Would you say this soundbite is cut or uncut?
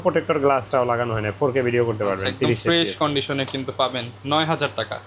uncut